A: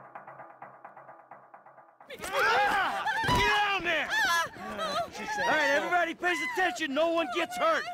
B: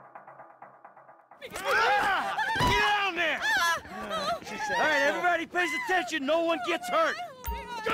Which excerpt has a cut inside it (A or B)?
B